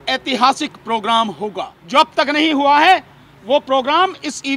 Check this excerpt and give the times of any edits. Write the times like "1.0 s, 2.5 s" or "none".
1.7 s